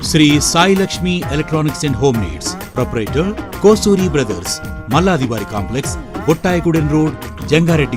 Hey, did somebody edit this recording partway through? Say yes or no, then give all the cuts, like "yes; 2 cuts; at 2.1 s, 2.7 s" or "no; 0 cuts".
no; 0 cuts